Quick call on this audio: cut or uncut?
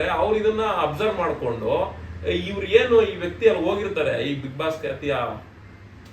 uncut